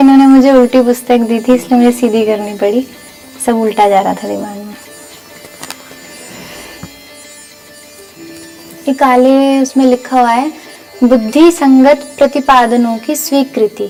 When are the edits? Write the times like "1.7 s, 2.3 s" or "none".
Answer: none

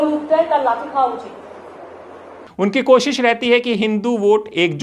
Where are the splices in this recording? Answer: none

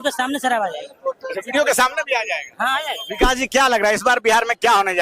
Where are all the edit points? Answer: 3.2 s

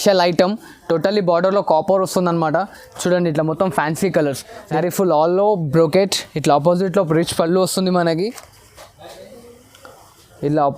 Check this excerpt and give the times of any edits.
4.8 s

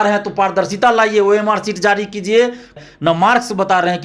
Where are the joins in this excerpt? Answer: 2.8 s

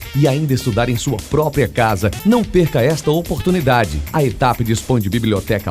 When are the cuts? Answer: none

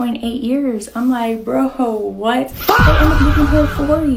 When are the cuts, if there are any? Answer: none

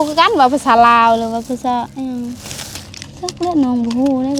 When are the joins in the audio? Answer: none

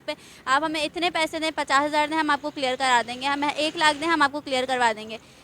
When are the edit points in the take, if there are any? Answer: none

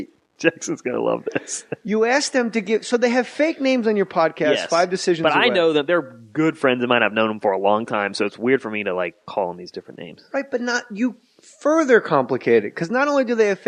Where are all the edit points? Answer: none

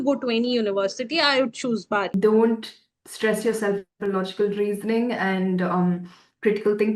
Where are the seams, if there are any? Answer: 2.1 s

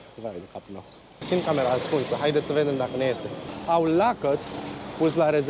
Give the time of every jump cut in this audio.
1.2 s, 3.5 s

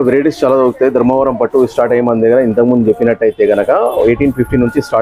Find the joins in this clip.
none

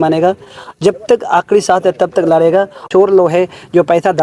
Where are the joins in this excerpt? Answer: 2.9 s

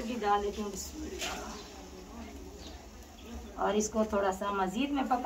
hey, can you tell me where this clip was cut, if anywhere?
none

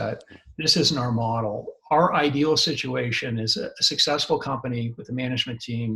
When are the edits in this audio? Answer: none

